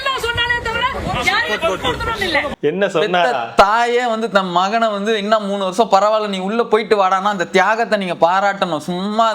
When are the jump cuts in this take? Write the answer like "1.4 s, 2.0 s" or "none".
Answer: 2.6 s